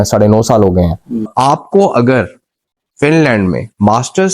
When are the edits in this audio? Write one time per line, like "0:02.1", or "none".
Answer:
0:01.3